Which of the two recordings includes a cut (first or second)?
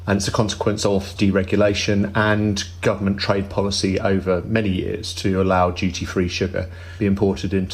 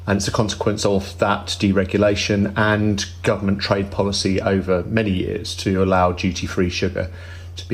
first